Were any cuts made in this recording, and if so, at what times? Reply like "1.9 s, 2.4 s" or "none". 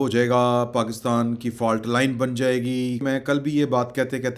3.0 s